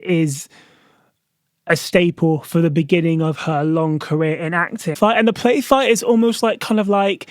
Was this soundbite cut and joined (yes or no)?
yes